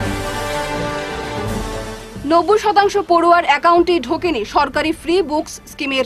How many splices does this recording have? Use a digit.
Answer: 1